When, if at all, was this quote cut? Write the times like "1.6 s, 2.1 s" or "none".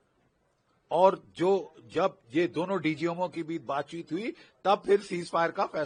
none